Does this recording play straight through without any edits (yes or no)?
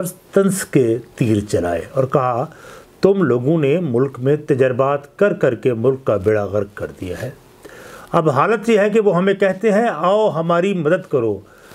yes